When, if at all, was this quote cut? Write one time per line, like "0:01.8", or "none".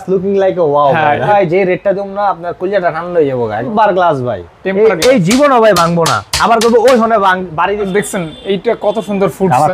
0:01.3
0:03.7
0:07.9